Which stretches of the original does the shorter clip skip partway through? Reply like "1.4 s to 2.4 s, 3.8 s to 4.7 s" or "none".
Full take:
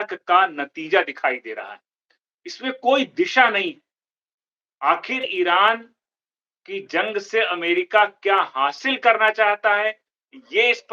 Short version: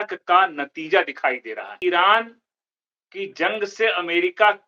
1.8 s to 5.3 s